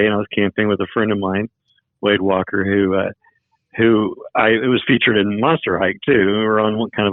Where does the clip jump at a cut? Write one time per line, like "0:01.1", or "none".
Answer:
none

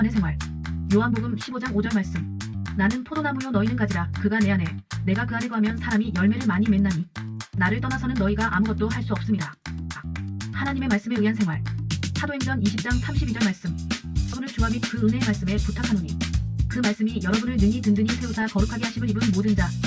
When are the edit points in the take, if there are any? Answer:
0:14.3

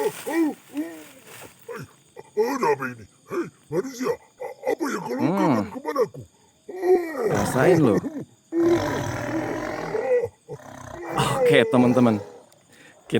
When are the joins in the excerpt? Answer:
0:11.5

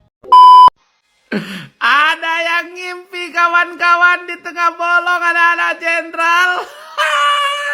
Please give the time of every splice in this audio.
0:00.9

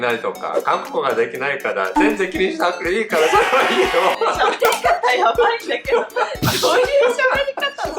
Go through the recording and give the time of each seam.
none

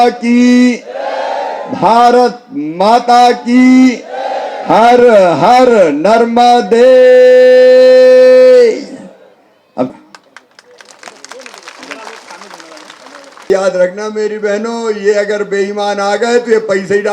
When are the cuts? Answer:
0:09.9
0:13.5

